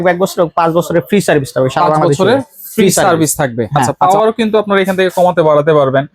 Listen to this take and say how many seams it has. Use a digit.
1